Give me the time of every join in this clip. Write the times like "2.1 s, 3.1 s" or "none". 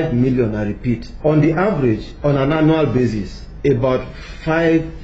1.1 s